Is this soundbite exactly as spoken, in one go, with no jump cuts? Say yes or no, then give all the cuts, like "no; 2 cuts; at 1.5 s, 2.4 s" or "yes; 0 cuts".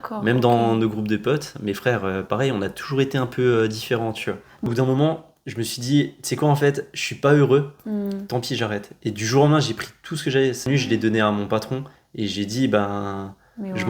no; 2 cuts; at 4.6 s, 10.6 s